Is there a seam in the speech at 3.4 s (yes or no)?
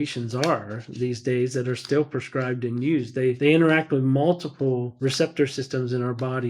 yes